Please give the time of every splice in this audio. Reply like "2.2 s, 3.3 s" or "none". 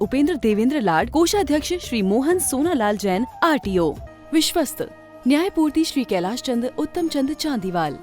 4.1 s